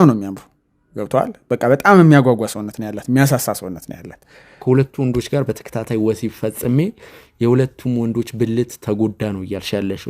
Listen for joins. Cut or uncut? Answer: cut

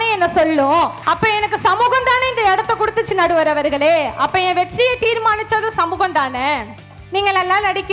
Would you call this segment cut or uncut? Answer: cut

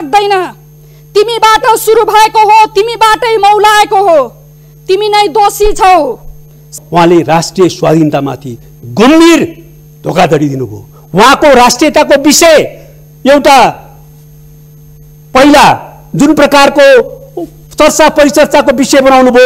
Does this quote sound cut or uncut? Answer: cut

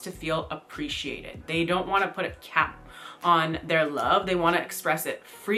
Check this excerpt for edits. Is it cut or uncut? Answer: uncut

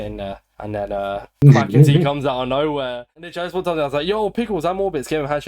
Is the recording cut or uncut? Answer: cut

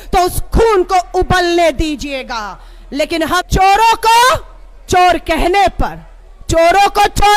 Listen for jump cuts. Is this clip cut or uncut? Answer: cut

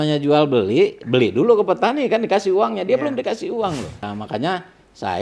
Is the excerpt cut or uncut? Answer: cut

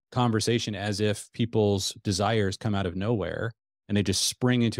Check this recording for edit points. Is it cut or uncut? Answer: uncut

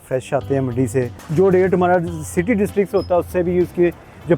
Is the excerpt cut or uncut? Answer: cut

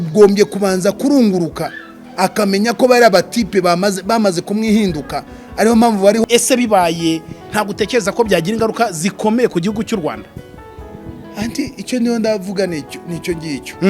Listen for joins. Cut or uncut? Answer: cut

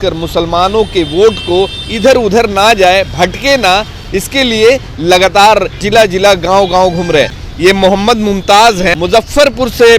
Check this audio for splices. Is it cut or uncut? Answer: cut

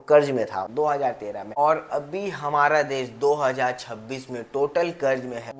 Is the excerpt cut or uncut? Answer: uncut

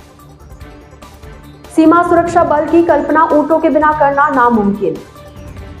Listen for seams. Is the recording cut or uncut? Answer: uncut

